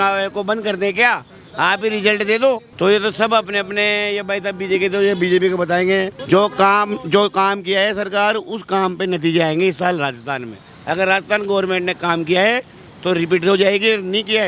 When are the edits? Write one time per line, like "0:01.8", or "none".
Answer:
none